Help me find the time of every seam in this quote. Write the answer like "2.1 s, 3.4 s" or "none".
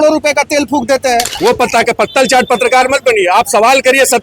1.3 s